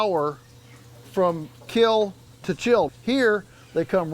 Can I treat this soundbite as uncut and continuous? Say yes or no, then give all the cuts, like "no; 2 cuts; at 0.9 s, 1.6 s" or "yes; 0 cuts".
no; 1 cut; at 2.9 s